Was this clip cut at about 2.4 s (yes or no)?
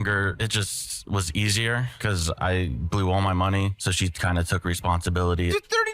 no